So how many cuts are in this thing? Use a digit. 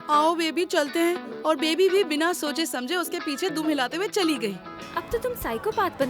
1